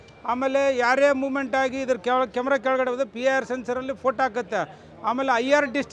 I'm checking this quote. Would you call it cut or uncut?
uncut